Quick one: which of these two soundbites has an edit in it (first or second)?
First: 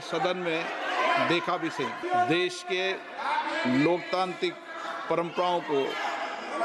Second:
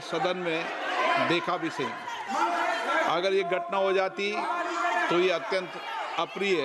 first